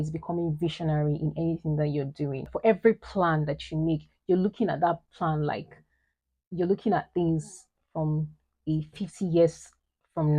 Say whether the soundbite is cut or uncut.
cut